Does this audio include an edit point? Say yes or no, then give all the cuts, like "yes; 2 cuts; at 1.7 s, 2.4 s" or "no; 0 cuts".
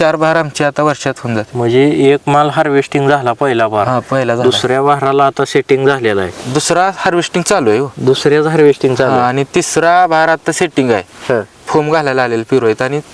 no; 0 cuts